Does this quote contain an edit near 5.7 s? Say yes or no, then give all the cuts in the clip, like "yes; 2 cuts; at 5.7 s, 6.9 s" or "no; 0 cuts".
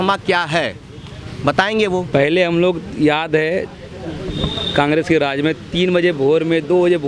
no; 1 cut; at 2.1 s